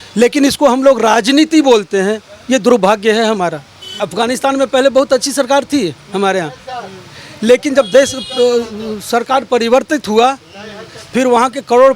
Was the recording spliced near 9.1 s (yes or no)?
no